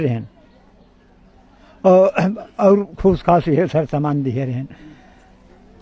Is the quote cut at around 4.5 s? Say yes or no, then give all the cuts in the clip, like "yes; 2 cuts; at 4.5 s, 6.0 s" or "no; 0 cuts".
no; 0 cuts